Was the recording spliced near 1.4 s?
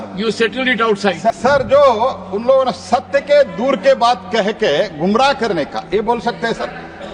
yes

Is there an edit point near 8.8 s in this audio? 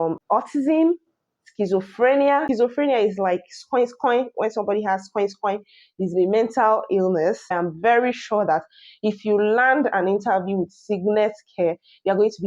no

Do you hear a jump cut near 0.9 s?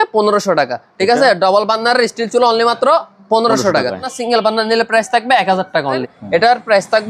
no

